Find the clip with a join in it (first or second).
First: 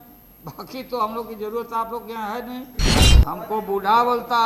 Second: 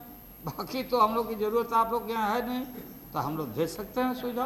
first